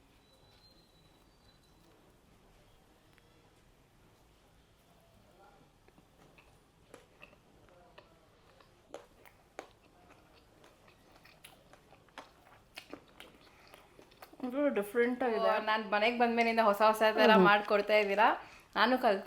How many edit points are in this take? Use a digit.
1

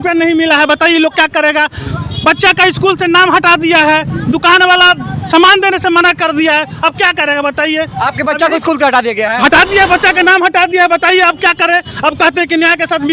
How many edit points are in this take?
0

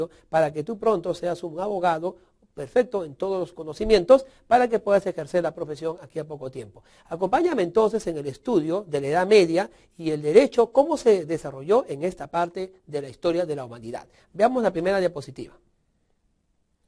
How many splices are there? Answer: 1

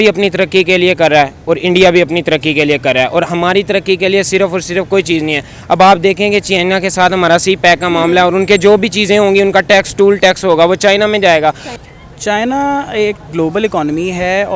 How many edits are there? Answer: 1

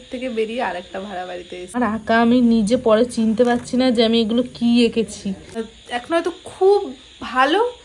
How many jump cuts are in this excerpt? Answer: 2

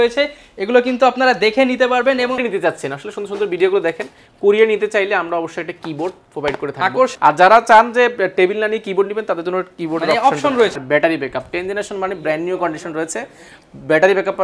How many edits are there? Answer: 3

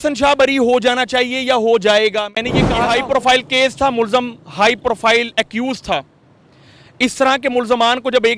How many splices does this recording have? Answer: 1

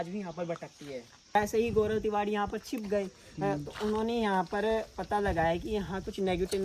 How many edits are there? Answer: 1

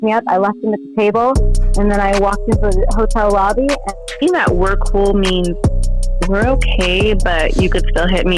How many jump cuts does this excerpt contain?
0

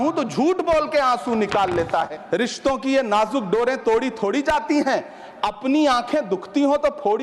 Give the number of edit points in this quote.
1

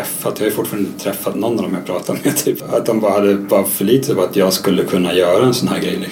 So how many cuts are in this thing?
1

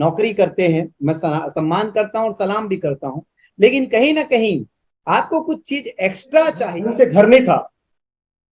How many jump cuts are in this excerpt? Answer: 2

